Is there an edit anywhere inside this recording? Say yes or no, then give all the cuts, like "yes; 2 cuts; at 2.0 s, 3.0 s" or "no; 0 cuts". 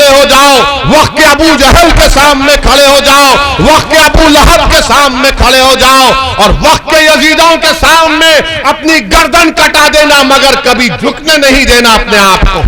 no; 0 cuts